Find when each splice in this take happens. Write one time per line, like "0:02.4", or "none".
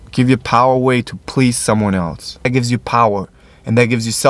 0:02.5